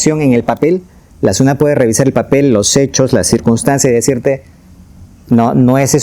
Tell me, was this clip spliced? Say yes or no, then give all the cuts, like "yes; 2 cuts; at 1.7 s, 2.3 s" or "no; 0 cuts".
no; 0 cuts